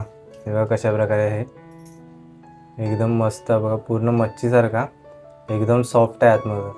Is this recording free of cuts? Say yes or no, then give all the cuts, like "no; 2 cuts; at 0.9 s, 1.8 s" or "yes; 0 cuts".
yes; 0 cuts